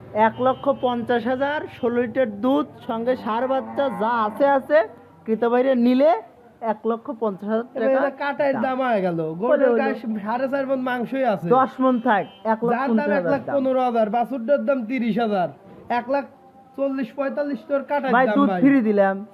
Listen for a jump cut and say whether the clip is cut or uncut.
uncut